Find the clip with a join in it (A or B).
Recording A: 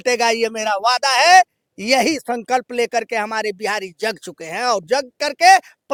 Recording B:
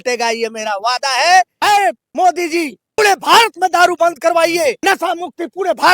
B